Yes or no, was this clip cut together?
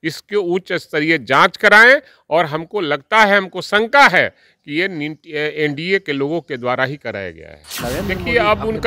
yes